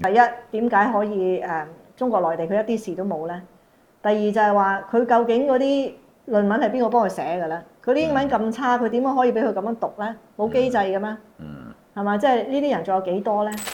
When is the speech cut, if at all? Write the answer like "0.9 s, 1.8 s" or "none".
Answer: none